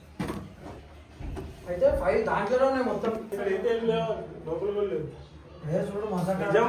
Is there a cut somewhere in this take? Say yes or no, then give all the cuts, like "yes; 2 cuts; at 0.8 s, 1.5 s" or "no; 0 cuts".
yes; 1 cut; at 3.3 s